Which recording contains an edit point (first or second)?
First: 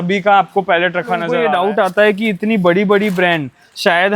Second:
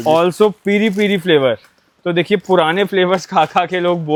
first